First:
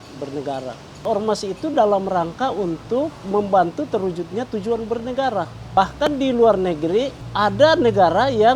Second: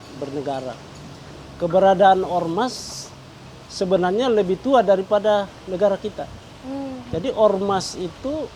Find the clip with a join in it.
first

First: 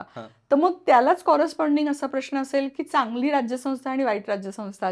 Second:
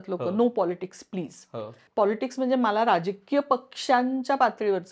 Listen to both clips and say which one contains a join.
second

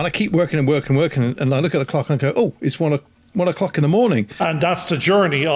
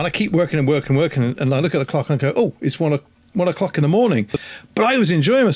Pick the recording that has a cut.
first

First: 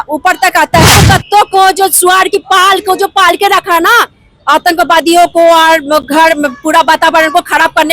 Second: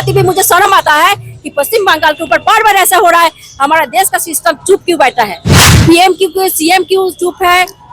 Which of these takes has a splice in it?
first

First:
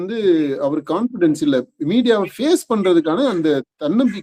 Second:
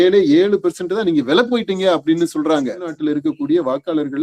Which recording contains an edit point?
second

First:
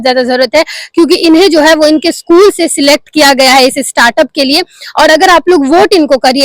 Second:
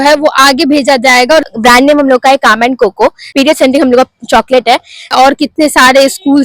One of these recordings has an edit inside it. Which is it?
second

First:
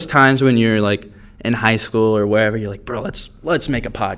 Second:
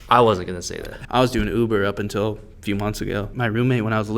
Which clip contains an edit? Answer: second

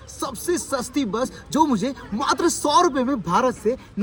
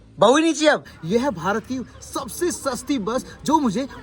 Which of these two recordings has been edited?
second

